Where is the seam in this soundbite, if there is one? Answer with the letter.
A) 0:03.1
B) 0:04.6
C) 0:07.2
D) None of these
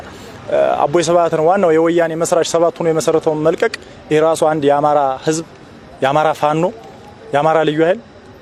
D